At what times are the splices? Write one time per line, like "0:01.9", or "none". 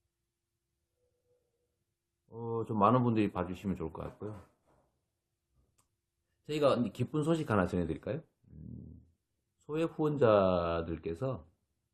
none